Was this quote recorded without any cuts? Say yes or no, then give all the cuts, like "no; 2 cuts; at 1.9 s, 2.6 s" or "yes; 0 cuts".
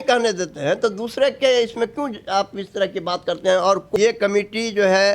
no; 1 cut; at 3.9 s